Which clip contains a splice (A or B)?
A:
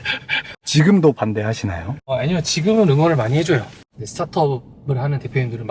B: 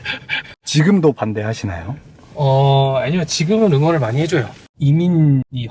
A